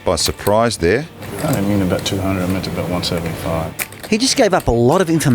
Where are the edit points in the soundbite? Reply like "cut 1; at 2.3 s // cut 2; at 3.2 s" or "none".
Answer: cut 1; at 1.2 s // cut 2; at 4.0 s

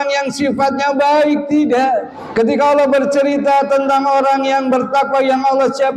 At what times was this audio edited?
cut 1; at 2.2 s

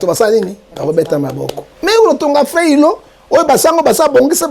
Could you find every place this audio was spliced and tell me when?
cut 1; at 1.6 s

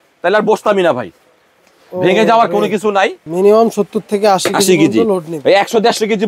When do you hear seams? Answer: cut 1; at 3.2 s

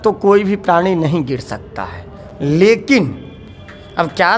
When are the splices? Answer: none

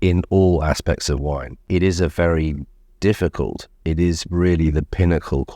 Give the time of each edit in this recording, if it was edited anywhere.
cut 1; at 1.6 s

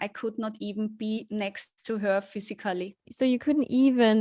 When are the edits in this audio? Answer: cut 1; at 3.1 s

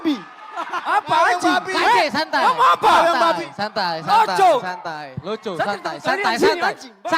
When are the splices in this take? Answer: none

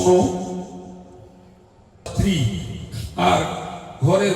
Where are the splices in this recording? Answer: cut 1; at 2.1 s

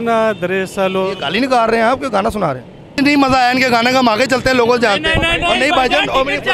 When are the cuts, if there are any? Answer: cut 1; at 2.4 s

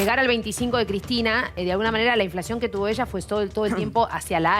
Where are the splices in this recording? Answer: cut 1; at 1.5 s

